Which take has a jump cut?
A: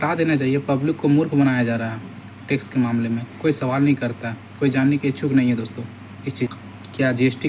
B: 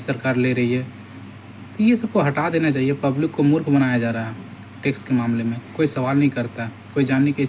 A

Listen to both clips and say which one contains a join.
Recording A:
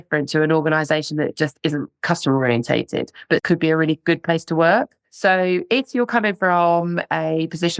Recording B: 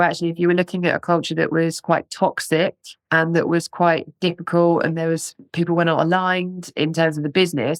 A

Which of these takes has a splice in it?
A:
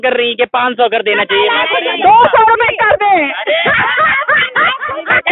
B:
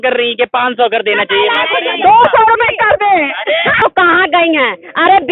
B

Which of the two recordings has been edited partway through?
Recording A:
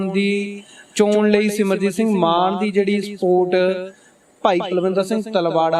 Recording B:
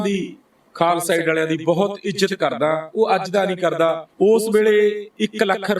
B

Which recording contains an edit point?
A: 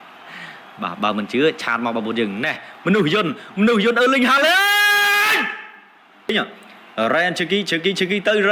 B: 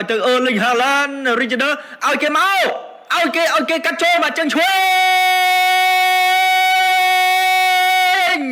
A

